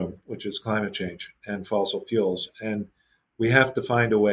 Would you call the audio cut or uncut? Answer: uncut